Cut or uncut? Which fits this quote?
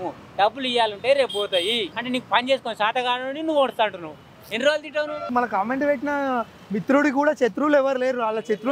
cut